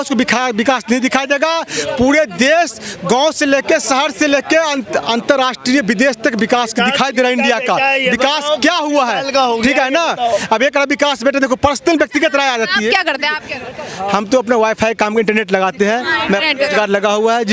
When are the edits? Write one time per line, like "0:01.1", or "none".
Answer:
none